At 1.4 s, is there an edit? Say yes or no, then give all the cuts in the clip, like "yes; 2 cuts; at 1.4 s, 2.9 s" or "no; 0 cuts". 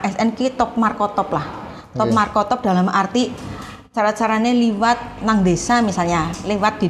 no; 0 cuts